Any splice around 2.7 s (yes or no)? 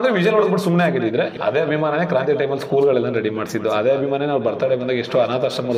no